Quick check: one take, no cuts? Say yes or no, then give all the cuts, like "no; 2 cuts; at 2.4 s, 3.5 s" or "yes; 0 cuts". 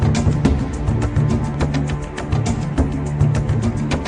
yes; 0 cuts